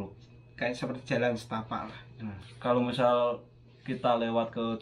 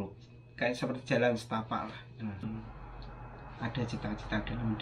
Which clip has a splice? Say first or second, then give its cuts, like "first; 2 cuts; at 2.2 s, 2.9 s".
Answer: second; 1 cut; at 2.5 s